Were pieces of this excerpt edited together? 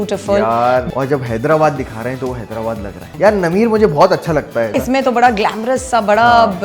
yes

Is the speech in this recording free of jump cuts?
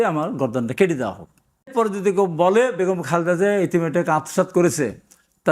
no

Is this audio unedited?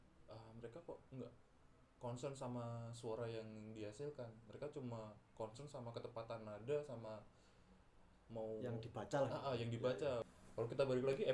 no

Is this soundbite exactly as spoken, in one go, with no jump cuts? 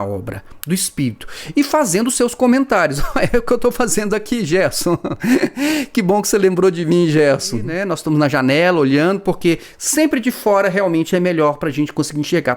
no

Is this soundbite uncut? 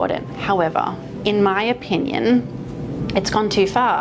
yes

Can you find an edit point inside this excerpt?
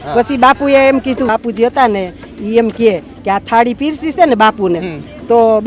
yes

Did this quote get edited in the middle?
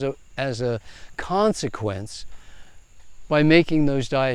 no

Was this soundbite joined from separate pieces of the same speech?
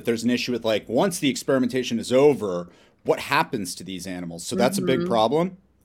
no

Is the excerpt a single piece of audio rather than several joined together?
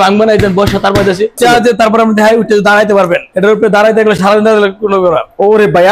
no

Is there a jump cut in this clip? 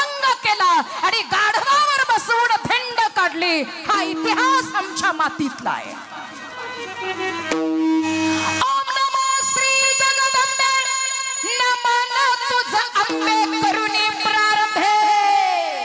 yes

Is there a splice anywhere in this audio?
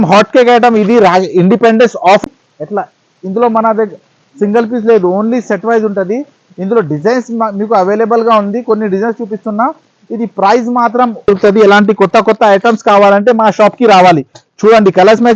yes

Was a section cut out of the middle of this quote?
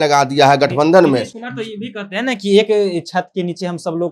no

